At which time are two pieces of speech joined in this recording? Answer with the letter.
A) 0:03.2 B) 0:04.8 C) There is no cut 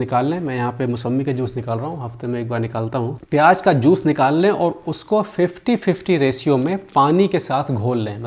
A